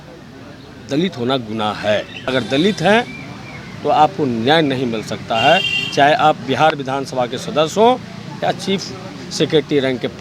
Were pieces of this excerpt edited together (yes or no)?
yes